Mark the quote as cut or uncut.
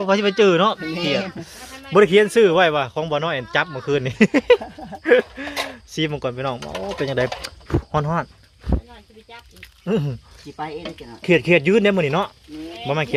uncut